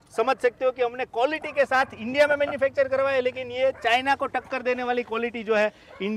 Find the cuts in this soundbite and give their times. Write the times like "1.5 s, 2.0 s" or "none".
none